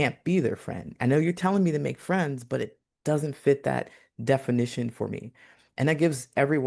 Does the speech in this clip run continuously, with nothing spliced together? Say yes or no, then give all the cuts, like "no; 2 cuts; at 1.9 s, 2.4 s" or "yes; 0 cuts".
yes; 0 cuts